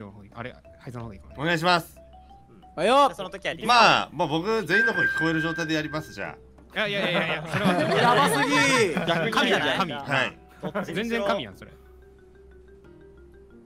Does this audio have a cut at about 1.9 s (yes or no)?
no